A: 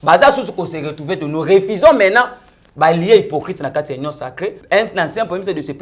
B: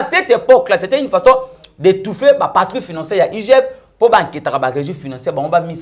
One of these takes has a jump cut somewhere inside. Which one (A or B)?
A